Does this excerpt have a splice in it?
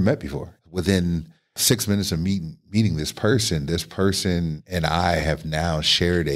no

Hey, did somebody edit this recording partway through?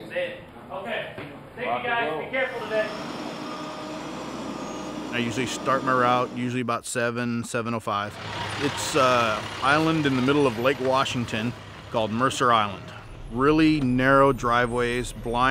yes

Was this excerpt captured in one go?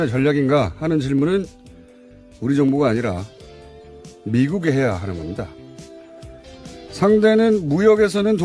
no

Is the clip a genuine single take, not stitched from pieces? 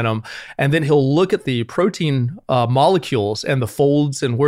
no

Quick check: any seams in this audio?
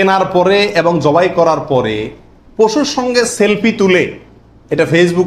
no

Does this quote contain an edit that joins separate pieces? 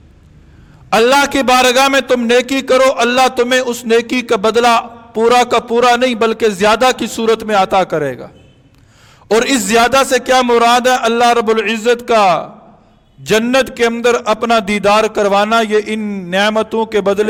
no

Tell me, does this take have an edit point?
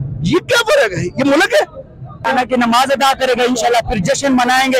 yes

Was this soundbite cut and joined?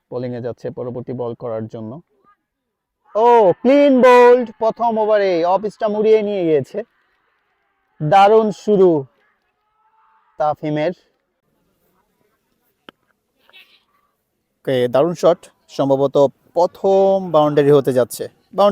yes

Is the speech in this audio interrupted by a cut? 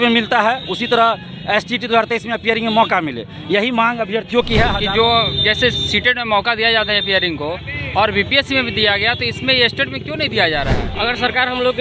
yes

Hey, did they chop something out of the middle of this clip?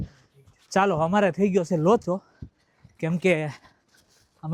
no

